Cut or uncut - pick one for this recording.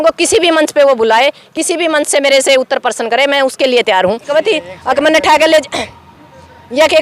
cut